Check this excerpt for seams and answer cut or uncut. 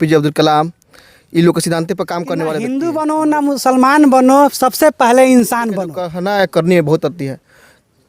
cut